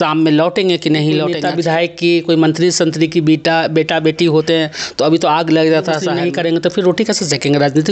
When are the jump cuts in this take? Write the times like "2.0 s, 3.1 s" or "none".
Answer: 1.4 s, 6.1 s